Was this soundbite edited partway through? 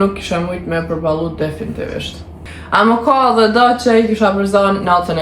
yes; 1 cut; at 2.4 s

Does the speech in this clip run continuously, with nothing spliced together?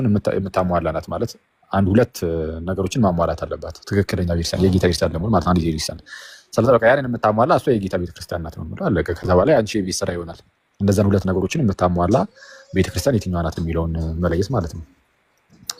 yes; 0 cuts

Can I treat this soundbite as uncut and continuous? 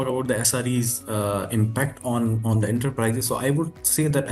yes; 0 cuts

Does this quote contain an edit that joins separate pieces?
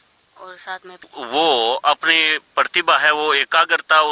yes; 1 cut; at 1.1 s

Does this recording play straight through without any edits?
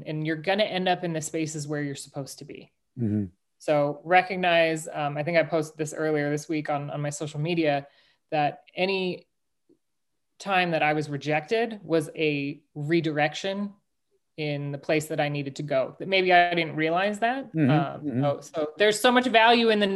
yes; 0 cuts

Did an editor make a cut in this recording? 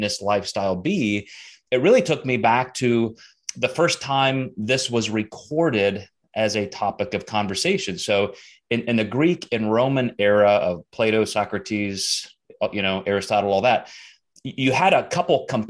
no; 0 cuts

